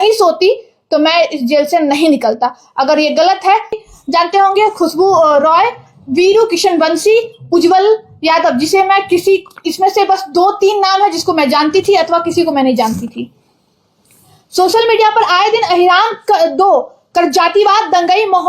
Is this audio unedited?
no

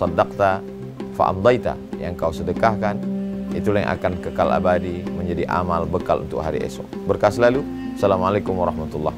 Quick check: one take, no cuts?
yes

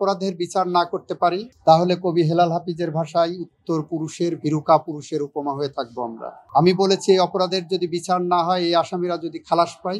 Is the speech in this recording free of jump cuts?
yes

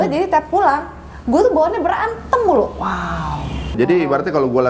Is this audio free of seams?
no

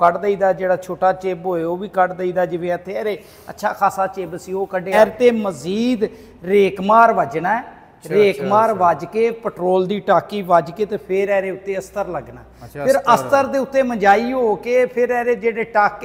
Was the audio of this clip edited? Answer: yes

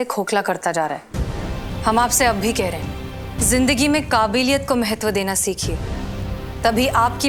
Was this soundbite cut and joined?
no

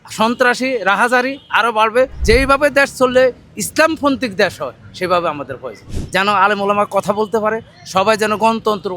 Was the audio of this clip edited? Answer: yes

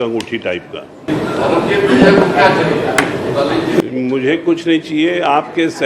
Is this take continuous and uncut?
no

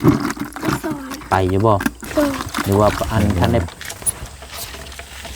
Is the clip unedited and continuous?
no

